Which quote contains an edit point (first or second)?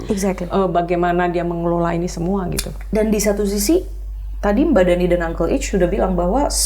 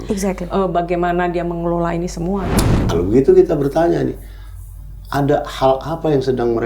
second